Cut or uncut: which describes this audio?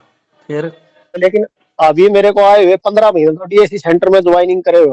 cut